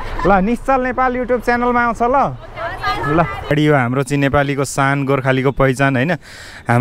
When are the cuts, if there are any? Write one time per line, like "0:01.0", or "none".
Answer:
0:03.5